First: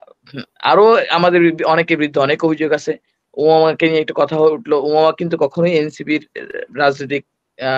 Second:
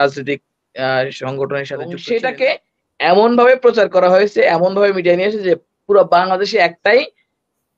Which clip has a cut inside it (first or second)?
second